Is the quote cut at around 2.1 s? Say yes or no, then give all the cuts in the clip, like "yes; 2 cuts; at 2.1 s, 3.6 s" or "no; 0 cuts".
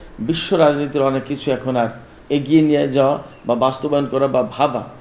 yes; 1 cut; at 2.1 s